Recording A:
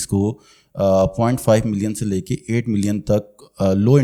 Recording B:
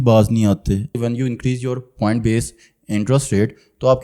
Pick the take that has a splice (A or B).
B